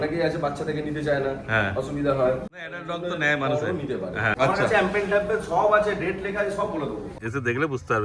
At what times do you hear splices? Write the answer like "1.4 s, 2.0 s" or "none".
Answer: 2.7 s, 4.3 s, 7.1 s